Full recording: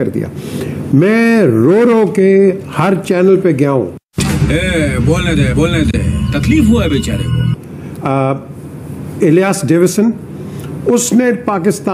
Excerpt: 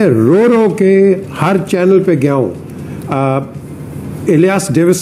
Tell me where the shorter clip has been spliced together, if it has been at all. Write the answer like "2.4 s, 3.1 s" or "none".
2.7 s